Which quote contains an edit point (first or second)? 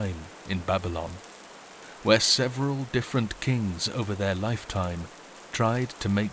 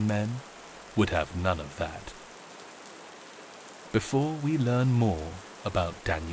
second